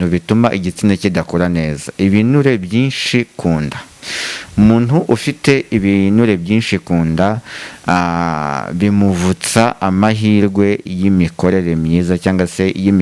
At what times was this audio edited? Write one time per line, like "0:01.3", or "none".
none